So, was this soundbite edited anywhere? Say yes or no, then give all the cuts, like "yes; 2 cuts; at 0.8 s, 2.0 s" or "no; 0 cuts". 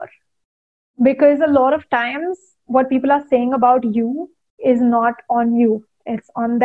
no; 0 cuts